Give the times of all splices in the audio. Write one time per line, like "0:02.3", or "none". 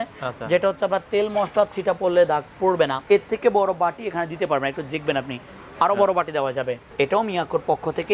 0:03.0
0:06.8